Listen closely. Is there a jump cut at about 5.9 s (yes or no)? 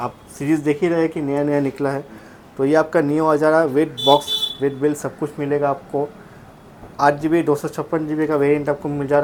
no